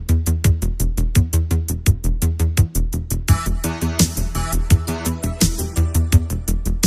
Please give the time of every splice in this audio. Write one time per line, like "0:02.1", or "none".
none